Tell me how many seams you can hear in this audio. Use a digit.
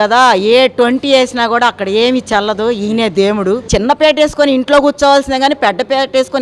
1